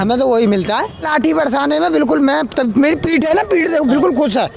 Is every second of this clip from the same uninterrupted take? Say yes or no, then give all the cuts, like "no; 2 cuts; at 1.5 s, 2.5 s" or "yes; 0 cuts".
no; 1 cut; at 1.1 s